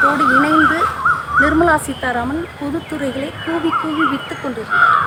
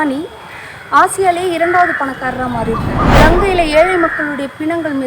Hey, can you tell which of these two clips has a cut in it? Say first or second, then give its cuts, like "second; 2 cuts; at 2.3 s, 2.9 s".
second; 1 cut; at 3.0 s